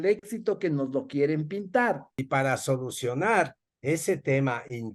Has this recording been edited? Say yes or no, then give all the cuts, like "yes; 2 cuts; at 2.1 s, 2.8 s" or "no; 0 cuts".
yes; 1 cut; at 2.2 s